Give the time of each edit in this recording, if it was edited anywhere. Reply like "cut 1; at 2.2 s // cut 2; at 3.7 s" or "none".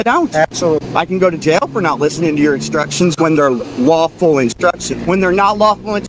cut 1; at 4.9 s